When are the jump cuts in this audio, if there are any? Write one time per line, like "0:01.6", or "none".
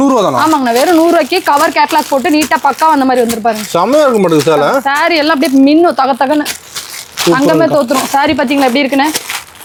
none